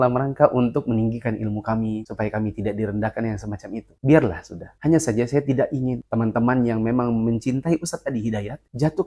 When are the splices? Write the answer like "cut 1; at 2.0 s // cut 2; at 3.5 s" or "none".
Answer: none